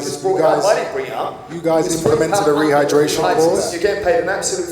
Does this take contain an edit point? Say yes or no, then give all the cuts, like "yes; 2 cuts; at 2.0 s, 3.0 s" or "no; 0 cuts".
yes; 1 cut; at 3.7 s